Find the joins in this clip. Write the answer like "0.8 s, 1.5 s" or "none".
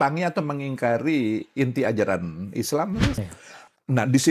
3.2 s